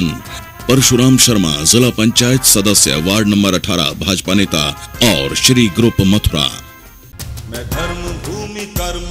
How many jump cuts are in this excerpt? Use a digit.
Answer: 1